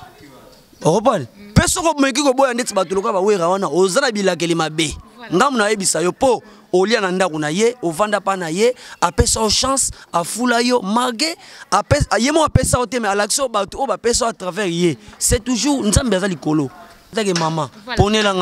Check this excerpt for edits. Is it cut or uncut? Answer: cut